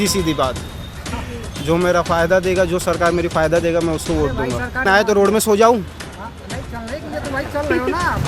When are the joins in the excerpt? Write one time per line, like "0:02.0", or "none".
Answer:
0:04.9

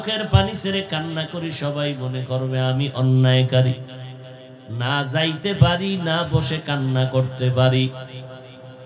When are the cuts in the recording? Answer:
none

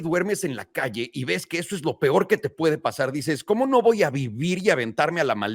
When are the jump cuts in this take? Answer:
none

